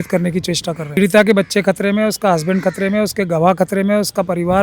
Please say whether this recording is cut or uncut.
cut